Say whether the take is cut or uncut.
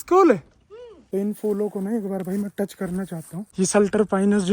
cut